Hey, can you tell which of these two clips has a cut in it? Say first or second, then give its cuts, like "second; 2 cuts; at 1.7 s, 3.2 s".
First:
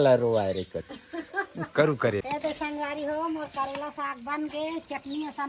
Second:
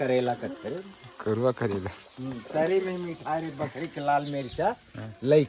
first; 1 cut; at 2.2 s